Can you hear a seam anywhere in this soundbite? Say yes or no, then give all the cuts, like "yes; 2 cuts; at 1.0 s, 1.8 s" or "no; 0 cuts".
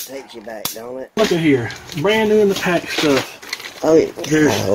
yes; 1 cut; at 1.2 s